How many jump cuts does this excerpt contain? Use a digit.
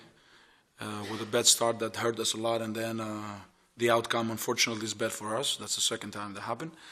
1